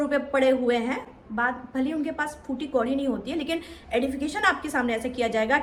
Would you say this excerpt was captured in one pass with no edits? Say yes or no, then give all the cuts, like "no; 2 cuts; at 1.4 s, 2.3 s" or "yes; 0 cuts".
yes; 0 cuts